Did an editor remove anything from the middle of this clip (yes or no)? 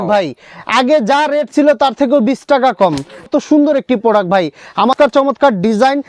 yes